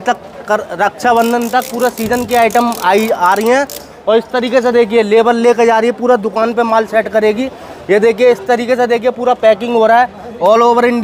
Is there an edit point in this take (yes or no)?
no